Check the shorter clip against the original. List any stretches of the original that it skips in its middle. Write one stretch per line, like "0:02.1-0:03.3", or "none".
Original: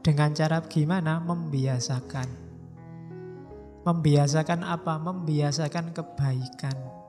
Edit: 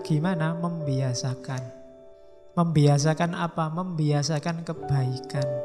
0:03.0-0:03.6